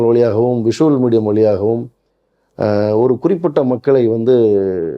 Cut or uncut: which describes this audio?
uncut